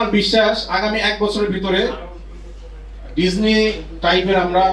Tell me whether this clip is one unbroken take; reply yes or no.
yes